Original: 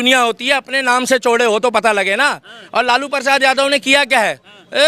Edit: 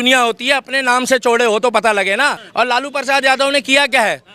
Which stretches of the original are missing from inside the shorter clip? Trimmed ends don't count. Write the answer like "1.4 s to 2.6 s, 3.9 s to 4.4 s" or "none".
2.4 s to 2.6 s